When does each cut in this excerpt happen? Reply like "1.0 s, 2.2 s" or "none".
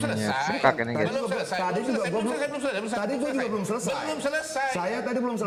none